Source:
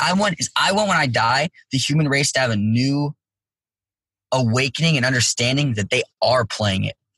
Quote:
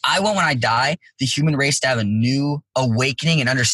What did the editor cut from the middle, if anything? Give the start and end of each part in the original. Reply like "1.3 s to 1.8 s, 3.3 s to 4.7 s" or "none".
3.2 s to 4.2 s

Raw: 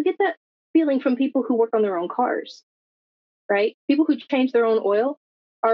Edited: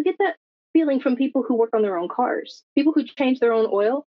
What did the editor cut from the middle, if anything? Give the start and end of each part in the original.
2.6 s to 3.8 s

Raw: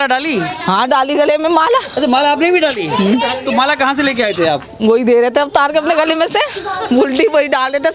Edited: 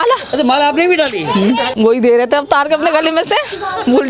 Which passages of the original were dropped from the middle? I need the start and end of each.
3.3 s to 4.7 s

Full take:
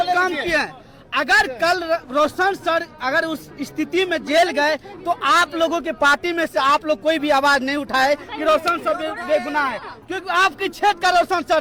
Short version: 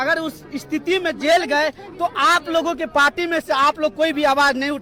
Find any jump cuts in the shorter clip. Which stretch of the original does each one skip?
none

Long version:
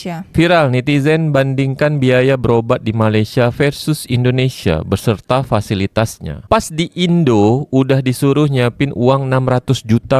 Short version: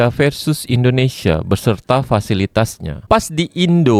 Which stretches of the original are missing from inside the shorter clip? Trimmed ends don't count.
none

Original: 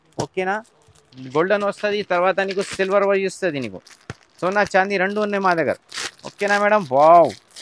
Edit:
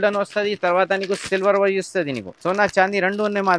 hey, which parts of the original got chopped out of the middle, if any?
3.7 s to 4.2 s

